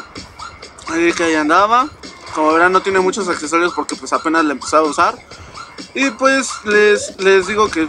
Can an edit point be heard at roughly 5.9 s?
no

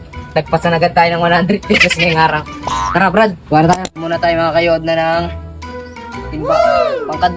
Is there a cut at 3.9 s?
yes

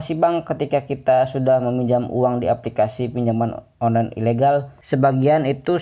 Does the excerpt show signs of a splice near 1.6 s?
no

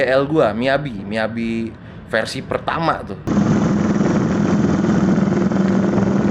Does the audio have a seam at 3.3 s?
no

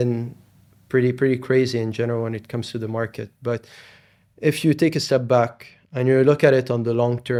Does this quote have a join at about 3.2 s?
no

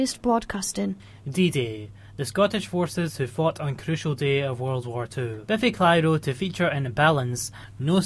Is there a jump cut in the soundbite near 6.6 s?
no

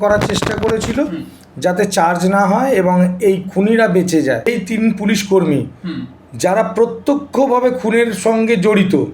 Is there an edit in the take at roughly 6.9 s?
no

